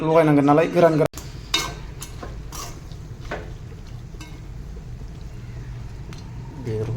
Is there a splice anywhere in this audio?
yes; 1 cut; at 1.0 s

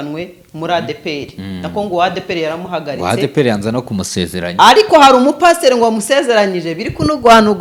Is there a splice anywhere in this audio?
no; 0 cuts

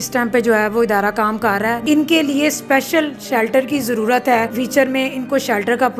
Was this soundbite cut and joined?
yes; 2 cuts; at 1.8 s, 4.5 s

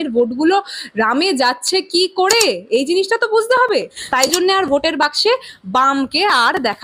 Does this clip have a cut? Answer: yes; 1 cut; at 4.0 s

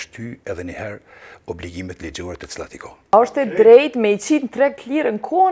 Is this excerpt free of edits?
no; 1 cut; at 3.1 s

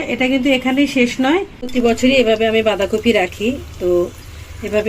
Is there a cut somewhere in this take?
yes; 1 cut; at 1.6 s

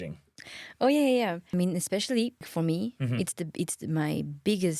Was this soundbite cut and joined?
yes; 2 cuts; at 1.5 s, 2.5 s

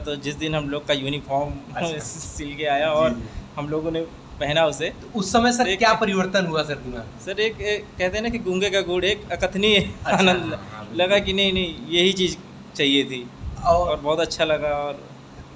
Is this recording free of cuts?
yes; 0 cuts

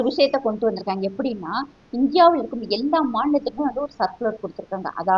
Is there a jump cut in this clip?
no; 0 cuts

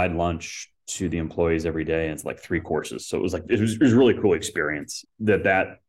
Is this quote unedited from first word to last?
no; 1 cut; at 5.0 s

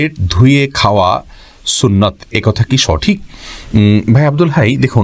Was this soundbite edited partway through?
no; 0 cuts

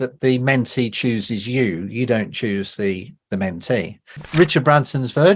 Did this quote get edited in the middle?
yes; 1 cut; at 4.2 s

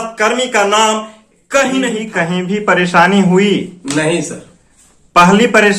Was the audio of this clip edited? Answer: yes; 1 cut; at 2.1 s

